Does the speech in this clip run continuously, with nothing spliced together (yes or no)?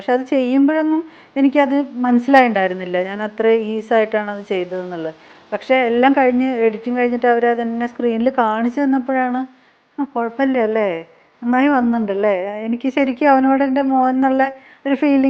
yes